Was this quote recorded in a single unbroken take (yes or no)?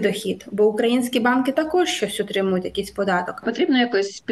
no